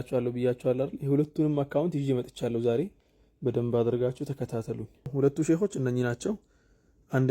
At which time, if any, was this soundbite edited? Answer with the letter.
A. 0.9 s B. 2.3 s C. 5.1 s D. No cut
C